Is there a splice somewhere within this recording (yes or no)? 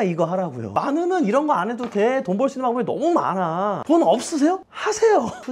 no